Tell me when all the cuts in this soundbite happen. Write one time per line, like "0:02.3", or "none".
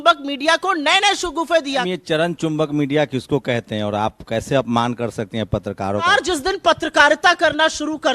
0:01.9
0:06.1